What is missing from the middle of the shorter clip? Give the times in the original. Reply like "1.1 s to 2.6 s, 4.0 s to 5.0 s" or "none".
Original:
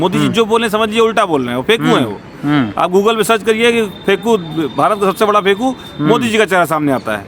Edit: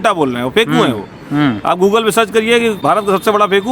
3.9 s to 4.7 s